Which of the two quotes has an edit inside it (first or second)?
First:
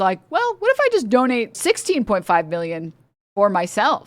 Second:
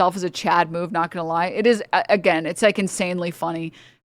first